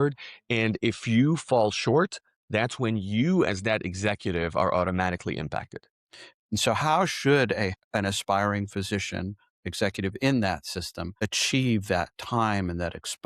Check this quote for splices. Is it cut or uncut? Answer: cut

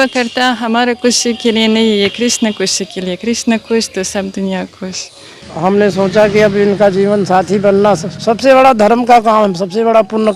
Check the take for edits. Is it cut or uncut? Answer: cut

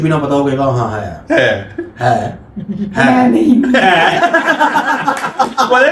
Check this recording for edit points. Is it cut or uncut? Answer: uncut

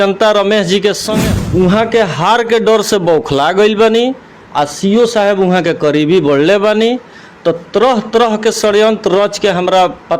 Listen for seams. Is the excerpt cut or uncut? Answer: cut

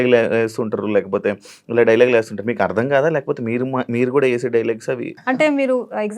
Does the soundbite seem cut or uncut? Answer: cut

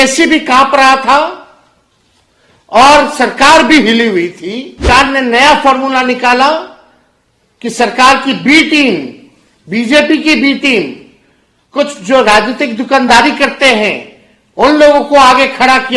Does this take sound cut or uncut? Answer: cut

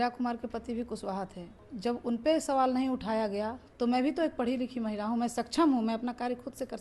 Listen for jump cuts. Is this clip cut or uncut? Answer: cut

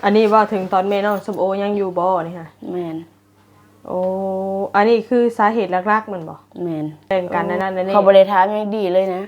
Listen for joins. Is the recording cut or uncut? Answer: cut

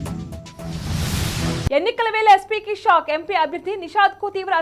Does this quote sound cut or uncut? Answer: cut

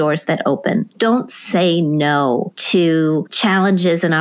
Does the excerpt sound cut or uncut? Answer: cut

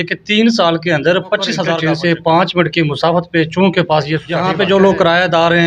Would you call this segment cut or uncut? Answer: cut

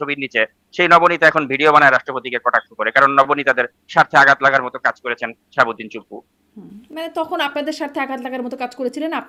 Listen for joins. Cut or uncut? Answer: uncut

